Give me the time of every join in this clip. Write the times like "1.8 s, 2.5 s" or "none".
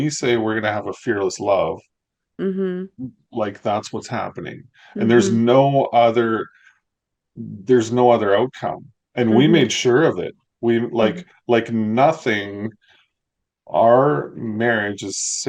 none